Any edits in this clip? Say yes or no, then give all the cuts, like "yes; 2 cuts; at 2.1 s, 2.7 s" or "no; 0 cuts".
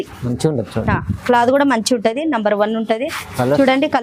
no; 0 cuts